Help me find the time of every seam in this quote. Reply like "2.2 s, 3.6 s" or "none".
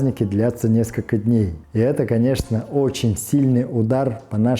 1.6 s

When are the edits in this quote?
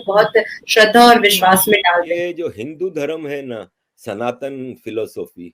2.1 s

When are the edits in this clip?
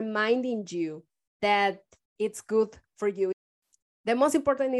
3.3 s

